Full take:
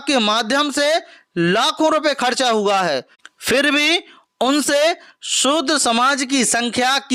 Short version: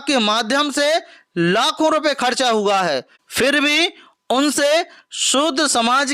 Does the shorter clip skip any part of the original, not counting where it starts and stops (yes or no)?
yes